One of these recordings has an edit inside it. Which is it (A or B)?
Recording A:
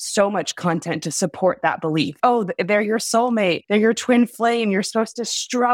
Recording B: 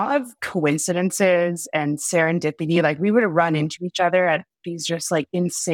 A